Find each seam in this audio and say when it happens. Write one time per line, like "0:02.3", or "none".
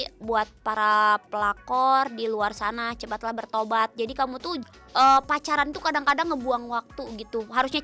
0:04.6